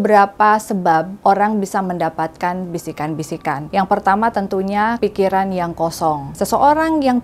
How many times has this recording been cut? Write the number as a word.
four